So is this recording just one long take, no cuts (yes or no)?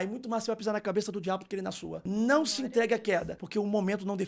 no